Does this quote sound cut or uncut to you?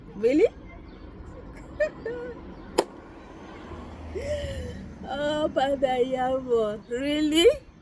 uncut